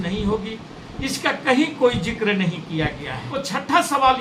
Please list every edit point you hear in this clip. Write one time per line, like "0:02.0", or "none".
0:03.3